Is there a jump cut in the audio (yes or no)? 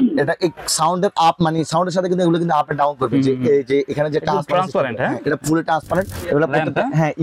yes